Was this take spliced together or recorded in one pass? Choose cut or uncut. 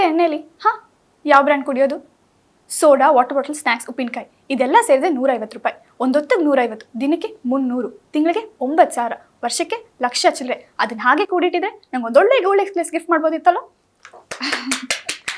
uncut